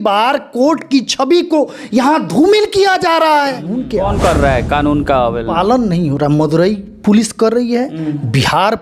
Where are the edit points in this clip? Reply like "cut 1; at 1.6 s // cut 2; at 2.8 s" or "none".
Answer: cut 1; at 3.8 s